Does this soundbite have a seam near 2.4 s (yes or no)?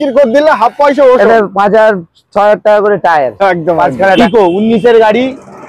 no